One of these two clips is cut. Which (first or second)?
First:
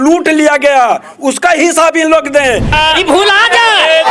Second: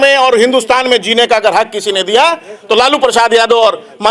first